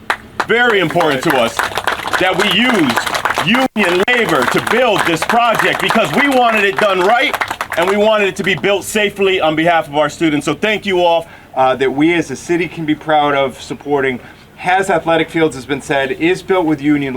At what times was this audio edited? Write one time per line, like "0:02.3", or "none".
0:11.3